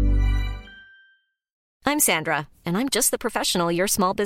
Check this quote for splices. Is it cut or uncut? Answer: cut